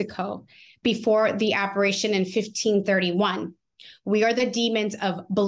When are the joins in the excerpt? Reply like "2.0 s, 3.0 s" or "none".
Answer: none